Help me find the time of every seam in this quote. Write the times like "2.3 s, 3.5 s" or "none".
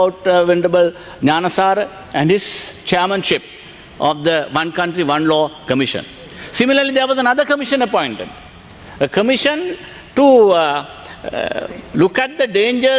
none